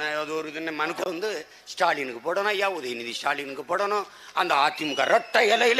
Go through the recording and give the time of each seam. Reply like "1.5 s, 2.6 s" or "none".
1.0 s